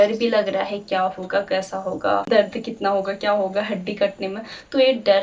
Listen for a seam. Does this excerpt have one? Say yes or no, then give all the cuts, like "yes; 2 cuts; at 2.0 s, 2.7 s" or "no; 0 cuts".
yes; 1 cut; at 2.3 s